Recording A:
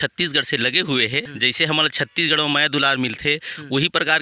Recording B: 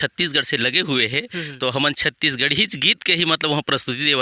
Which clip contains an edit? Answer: A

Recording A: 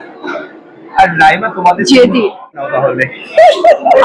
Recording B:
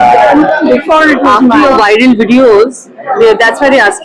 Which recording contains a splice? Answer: A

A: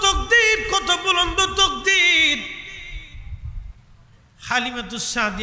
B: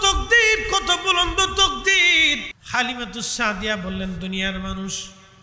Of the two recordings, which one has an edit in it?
B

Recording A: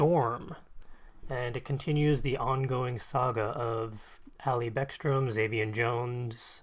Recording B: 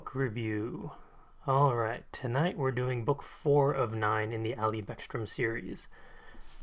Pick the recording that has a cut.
B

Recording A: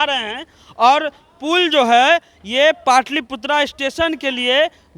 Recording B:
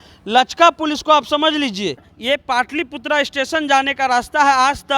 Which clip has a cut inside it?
B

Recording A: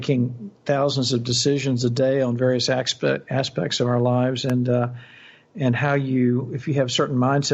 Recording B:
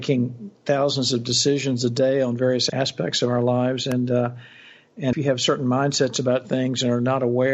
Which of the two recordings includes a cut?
B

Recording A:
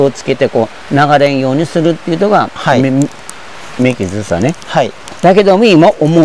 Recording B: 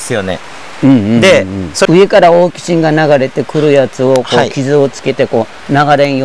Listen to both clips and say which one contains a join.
B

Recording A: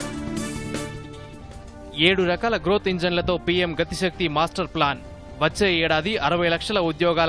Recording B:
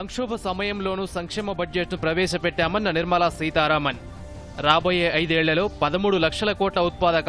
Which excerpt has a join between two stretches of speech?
A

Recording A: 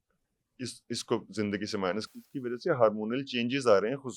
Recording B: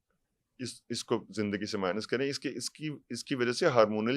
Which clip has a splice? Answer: A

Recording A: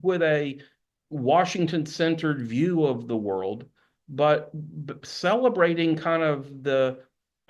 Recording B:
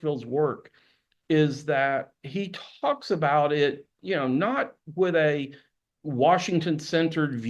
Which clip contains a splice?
B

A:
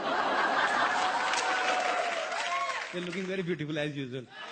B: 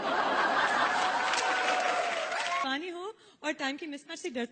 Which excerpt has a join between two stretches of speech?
B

